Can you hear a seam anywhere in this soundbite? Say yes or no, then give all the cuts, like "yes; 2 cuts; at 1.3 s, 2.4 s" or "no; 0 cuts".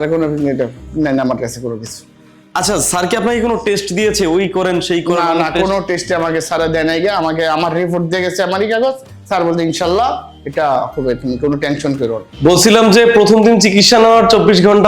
yes; 1 cut; at 12.3 s